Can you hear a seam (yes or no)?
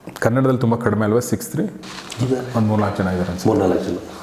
no